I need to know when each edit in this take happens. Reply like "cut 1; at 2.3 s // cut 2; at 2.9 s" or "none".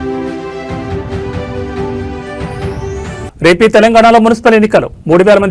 cut 1; at 2.1 s